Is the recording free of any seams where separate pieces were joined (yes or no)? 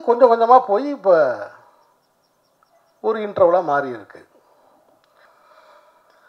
no